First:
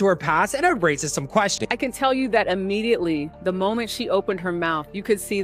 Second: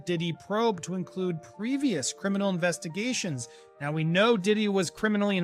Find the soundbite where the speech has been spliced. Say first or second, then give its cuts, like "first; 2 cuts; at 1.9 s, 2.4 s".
first; 1 cut; at 1.6 s